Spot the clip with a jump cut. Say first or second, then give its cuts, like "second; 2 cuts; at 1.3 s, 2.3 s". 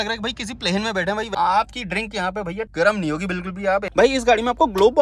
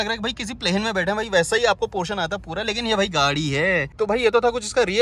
first; 2 cuts; at 1.3 s, 3.9 s